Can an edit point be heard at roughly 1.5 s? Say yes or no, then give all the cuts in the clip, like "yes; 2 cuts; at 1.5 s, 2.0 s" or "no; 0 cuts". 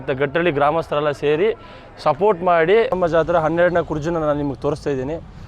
no; 1 cut; at 3.0 s